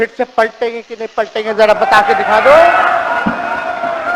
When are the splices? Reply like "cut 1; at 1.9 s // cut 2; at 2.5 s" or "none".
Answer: none

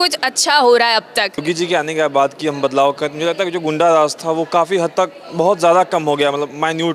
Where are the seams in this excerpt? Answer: cut 1; at 1.4 s

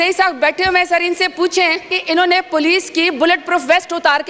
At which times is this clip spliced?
cut 1; at 1.9 s

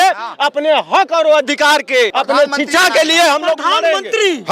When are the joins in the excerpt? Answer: cut 1; at 2.2 s

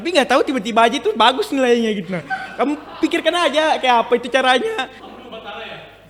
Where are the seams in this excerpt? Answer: cut 1; at 4.9 s

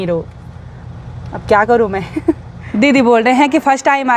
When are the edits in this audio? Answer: cut 1; at 2.6 s

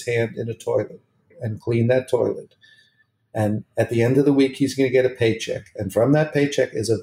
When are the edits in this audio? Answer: cut 1; at 1.4 s

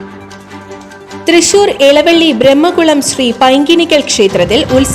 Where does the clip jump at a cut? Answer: cut 1; at 1.2 s

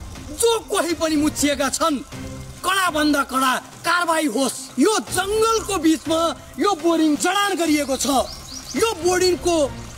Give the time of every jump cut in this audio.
cut 1; at 4.7 s

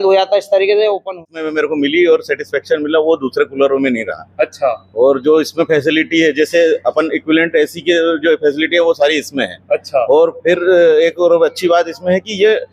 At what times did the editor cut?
cut 1; at 1.1 s

